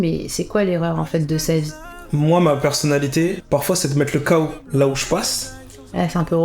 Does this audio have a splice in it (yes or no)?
yes